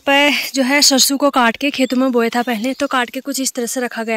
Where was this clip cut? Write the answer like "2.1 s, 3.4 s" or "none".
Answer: none